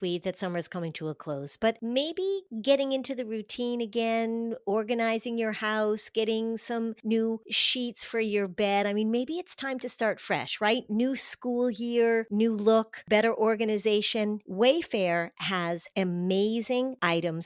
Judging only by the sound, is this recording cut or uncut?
uncut